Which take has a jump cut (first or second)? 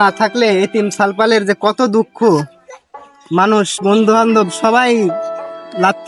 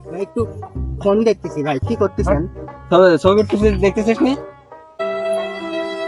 second